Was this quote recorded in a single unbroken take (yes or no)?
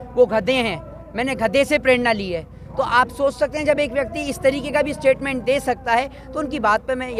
yes